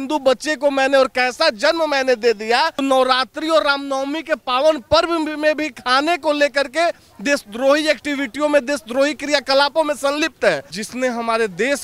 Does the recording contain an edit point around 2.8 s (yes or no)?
yes